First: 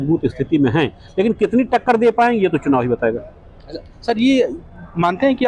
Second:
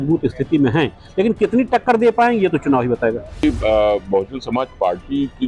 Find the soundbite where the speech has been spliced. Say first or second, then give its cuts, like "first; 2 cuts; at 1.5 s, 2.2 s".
second; 1 cut; at 3.4 s